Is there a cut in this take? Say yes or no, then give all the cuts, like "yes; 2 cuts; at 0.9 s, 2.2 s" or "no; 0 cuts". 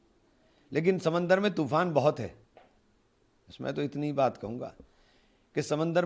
no; 0 cuts